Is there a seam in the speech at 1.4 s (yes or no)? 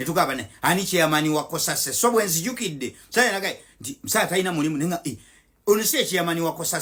no